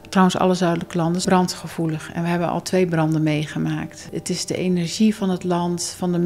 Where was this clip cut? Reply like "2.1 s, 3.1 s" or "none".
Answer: 1.2 s, 4.1 s